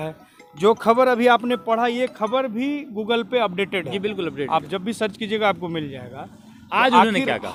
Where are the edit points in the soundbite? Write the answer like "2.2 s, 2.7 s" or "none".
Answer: none